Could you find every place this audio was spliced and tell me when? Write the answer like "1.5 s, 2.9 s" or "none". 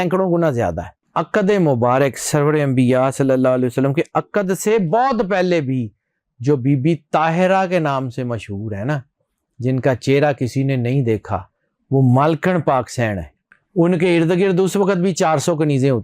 0.9 s